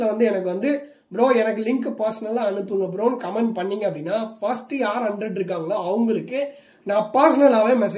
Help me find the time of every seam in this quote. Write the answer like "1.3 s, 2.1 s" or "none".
none

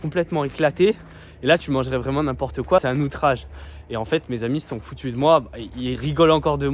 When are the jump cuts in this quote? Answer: 2.8 s

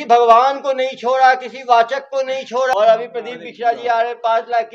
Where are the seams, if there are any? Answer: 2.7 s

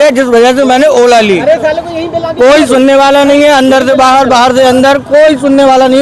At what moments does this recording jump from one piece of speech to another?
none

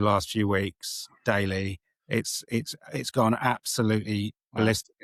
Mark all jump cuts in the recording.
none

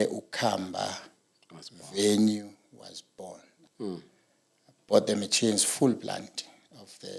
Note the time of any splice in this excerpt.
3.7 s

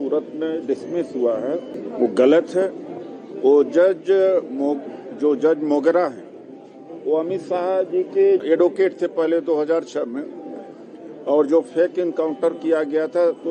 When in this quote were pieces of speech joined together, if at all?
1.8 s, 8.4 s

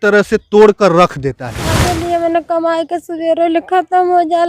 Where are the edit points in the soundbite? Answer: 1.8 s

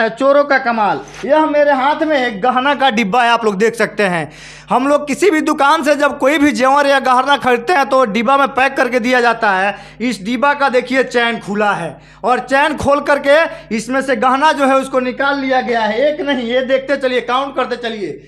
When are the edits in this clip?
1.1 s

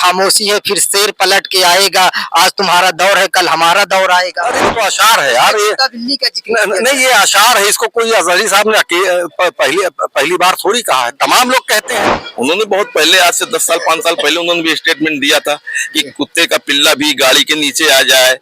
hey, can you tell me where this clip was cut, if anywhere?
4.7 s, 12.2 s

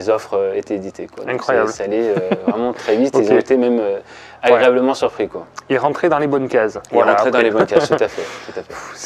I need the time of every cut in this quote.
none

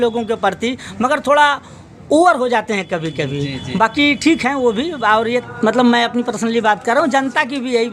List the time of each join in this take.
5.2 s

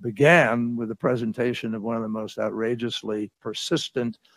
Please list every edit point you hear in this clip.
none

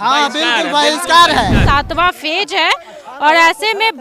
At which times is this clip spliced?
1.6 s

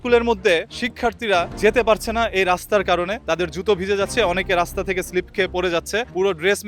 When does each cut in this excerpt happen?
none

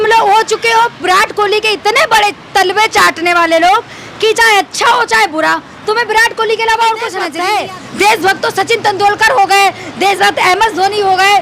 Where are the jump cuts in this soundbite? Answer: 7.3 s

